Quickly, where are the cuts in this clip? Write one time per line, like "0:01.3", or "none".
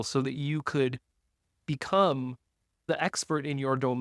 0:02.9